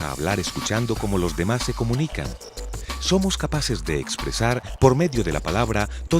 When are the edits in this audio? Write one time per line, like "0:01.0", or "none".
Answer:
none